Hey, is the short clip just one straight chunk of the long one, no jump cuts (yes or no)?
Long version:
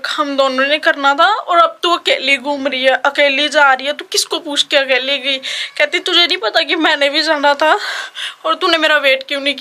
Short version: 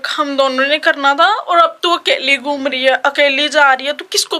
yes